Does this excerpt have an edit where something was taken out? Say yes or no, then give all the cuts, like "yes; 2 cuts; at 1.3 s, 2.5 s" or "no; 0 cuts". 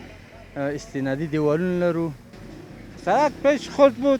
yes; 1 cut; at 2.4 s